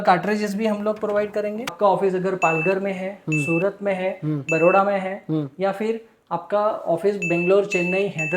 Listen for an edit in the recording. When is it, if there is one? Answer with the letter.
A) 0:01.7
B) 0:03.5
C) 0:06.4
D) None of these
A